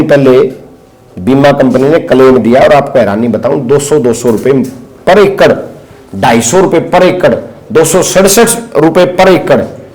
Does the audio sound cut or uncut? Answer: uncut